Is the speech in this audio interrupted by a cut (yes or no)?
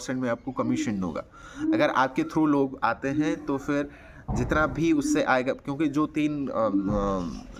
no